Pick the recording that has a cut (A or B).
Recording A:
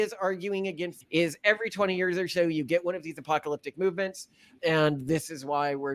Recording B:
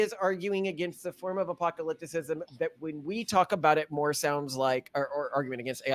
A